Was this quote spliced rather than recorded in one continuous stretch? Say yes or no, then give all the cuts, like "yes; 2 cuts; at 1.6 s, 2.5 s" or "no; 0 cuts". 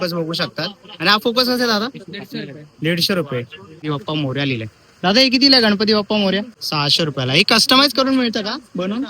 yes; 2 cuts; at 3.8 s, 6.6 s